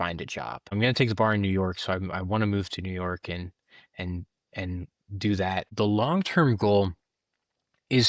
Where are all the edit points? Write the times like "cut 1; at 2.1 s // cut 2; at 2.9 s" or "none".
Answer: cut 1; at 5.7 s